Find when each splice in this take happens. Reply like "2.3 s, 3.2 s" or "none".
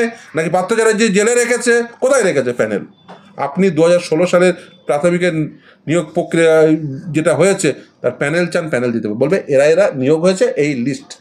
none